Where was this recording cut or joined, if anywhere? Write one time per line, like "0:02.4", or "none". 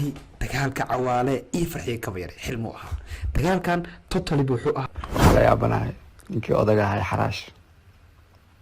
0:04.9

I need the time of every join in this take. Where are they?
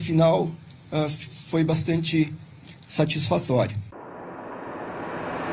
0:03.9

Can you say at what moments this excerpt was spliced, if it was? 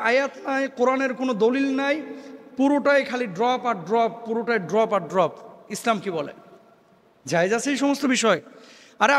none

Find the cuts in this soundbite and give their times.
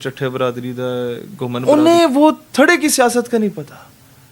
0:01.6

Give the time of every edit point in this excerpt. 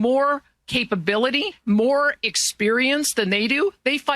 0:01.5

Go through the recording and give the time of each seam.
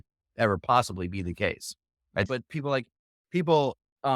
0:02.2

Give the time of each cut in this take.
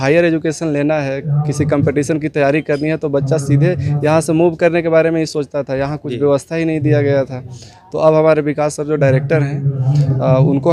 none

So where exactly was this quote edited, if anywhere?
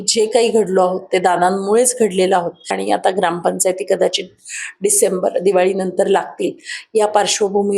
0:02.8

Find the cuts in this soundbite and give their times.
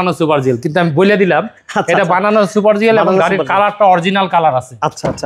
none

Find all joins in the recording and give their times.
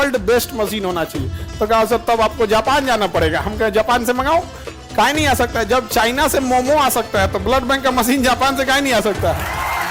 none

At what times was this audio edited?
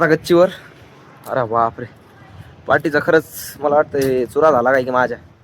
none

